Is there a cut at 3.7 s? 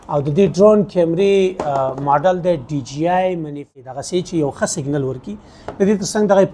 yes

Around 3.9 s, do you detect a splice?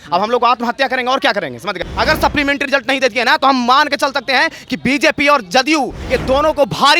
no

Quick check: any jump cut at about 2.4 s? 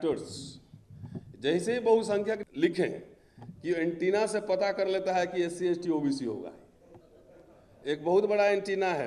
yes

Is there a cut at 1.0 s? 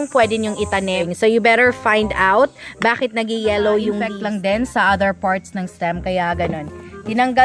yes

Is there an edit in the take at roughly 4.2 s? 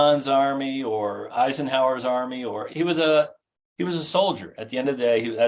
no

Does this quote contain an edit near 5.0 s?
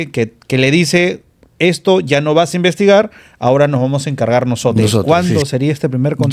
yes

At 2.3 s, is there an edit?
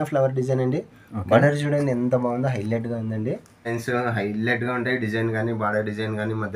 no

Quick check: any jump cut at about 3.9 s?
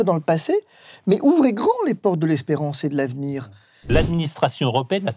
yes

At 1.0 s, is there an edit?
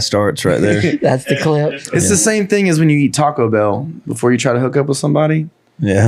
no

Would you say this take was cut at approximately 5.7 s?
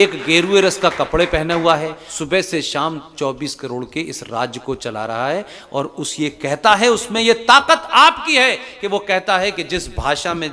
no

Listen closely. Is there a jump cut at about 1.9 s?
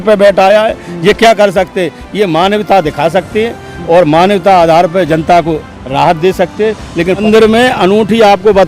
no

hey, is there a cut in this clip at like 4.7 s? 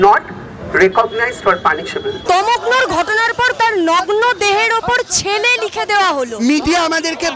no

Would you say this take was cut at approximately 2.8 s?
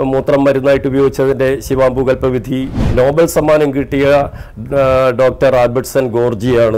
yes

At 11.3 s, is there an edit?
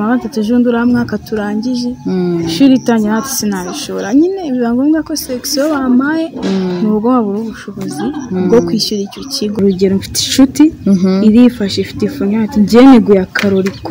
no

